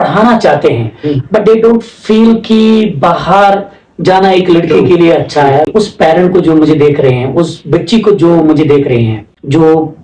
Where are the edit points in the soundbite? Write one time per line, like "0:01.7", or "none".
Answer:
none